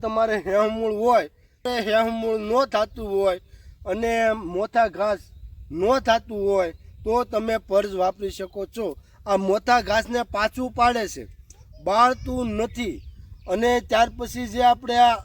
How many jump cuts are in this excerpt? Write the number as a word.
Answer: one